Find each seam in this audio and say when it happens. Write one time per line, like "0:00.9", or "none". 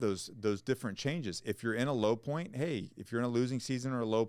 none